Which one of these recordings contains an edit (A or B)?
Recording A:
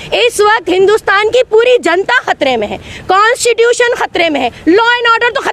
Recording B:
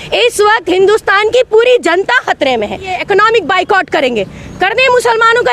B